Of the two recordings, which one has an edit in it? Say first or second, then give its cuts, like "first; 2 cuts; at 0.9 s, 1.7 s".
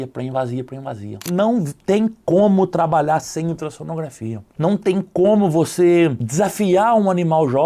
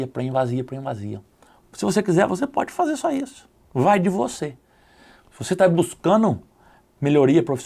first; 2 cuts; at 1.2 s, 6.2 s